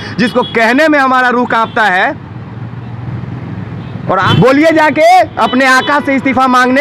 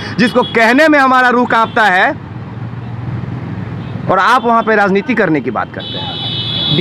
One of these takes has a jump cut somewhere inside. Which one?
first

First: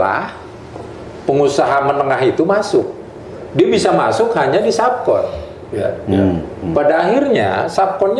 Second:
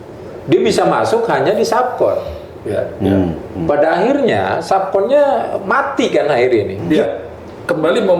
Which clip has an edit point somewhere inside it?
second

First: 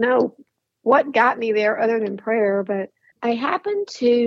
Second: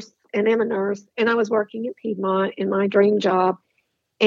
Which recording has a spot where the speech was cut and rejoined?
first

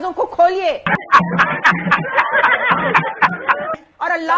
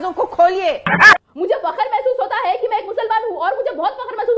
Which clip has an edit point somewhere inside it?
second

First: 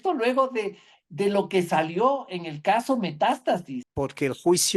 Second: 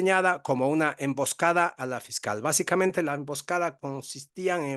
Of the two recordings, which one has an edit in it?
first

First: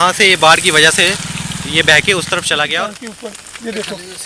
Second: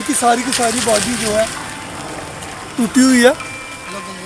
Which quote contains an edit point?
first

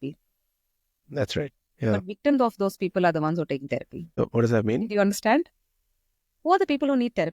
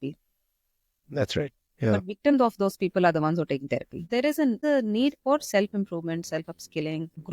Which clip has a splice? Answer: second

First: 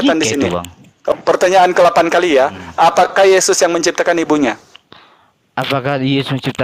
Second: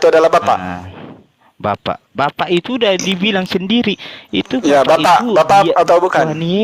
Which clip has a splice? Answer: first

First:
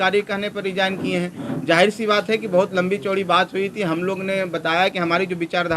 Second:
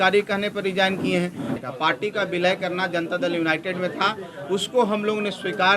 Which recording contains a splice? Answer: second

